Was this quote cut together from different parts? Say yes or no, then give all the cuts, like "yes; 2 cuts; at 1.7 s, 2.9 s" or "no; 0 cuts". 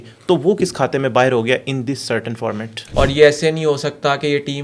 yes; 1 cut; at 2.8 s